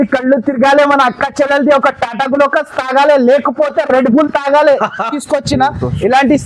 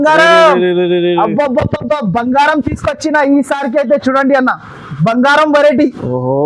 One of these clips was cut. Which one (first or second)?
first